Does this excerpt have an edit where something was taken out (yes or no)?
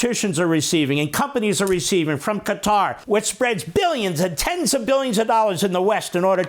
yes